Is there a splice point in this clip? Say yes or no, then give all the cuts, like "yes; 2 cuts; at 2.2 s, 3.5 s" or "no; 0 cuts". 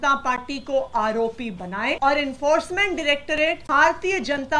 yes; 2 cuts; at 2.0 s, 3.6 s